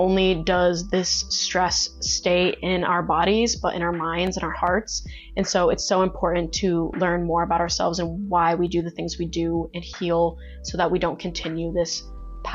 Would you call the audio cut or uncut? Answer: uncut